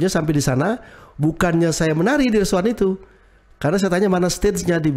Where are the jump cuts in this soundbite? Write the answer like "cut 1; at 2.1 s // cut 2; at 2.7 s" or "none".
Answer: none